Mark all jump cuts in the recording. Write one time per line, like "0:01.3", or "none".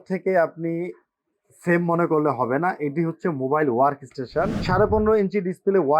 0:04.5